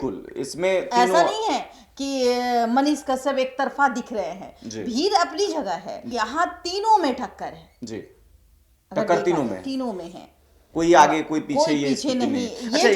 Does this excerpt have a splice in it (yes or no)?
yes